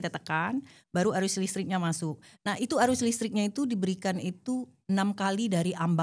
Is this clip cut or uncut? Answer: uncut